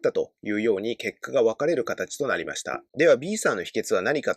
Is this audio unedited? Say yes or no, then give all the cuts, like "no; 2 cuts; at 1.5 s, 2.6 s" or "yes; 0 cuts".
yes; 0 cuts